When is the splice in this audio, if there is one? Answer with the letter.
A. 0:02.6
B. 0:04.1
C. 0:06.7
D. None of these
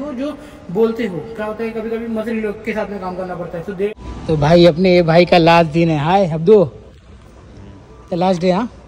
B